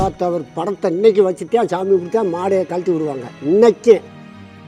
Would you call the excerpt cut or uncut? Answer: uncut